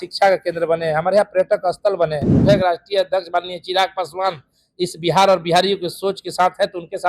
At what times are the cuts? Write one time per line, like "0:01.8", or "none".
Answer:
0:02.4